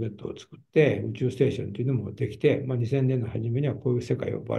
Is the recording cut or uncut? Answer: uncut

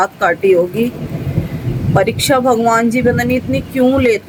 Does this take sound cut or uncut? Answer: uncut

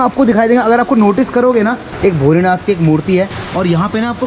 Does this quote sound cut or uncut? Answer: cut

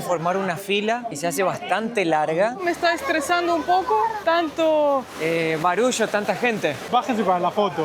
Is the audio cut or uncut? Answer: cut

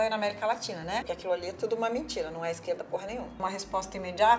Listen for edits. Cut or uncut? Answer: cut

